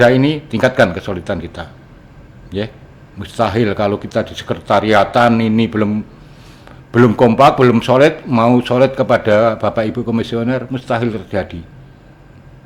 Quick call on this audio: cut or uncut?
uncut